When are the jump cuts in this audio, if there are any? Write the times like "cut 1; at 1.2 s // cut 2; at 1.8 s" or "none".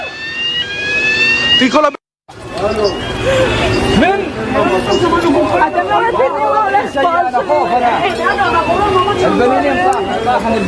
cut 1; at 8.1 s